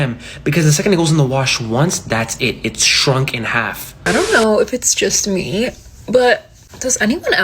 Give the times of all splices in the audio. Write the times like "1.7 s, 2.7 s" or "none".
3.9 s